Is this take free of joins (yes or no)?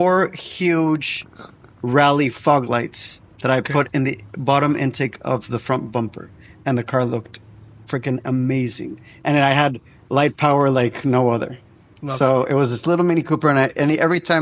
yes